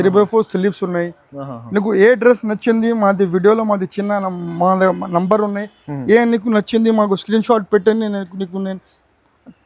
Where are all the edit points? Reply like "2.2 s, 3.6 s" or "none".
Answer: none